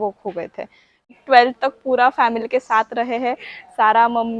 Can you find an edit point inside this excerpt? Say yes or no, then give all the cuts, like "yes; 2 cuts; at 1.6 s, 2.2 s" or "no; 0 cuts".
yes; 1 cut; at 1.1 s